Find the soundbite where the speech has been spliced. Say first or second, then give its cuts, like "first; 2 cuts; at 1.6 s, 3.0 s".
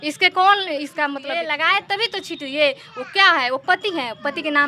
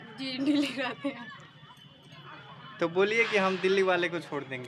first; 1 cut; at 1.3 s